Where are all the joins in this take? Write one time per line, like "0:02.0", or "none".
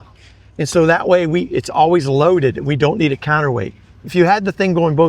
none